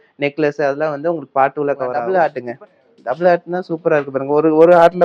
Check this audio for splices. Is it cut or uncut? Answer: cut